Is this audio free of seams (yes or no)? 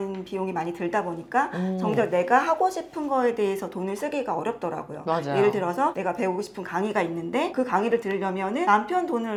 yes